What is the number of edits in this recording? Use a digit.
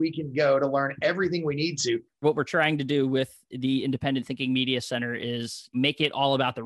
2